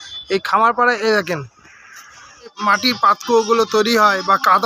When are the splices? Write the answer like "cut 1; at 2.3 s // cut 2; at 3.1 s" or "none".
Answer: cut 1; at 2.7 s